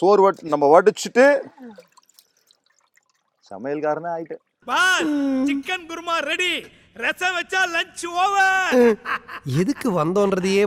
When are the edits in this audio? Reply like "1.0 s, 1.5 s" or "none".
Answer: none